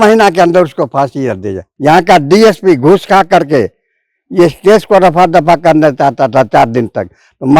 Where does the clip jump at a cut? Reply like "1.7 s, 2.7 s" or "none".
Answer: 1.6 s